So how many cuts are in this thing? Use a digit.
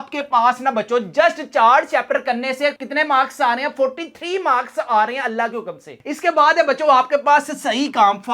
1